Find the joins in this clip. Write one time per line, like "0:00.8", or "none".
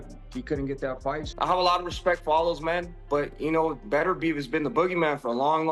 0:01.3